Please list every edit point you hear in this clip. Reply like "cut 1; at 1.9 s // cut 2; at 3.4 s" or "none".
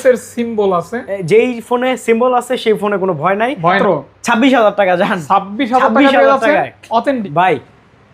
cut 1; at 3.8 s // cut 2; at 7.2 s